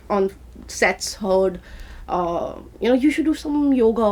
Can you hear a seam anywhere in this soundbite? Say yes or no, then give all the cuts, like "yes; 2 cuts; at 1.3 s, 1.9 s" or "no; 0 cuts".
no; 0 cuts